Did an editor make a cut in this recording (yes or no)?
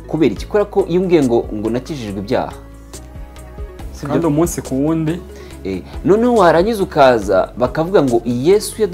no